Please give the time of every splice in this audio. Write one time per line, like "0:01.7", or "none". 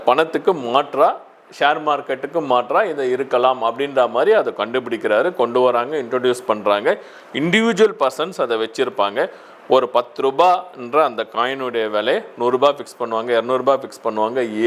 none